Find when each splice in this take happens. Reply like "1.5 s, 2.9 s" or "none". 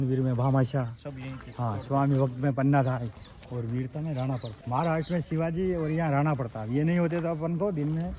4.5 s